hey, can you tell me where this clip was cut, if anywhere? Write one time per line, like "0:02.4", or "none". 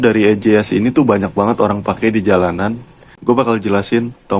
0:03.1